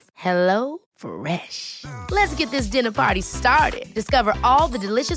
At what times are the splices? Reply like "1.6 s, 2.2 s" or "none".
none